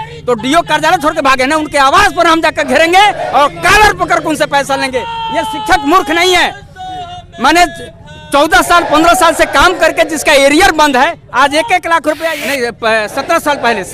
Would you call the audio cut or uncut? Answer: cut